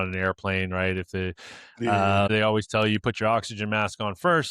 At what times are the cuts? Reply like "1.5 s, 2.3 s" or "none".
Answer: 2.3 s